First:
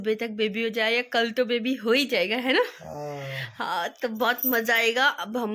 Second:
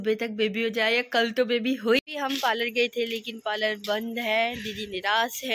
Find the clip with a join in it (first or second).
second